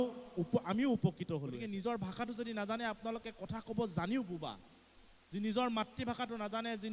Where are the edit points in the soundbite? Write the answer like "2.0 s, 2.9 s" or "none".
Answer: 1.5 s